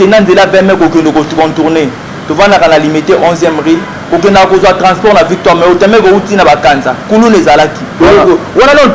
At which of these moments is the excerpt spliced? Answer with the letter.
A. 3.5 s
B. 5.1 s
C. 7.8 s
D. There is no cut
C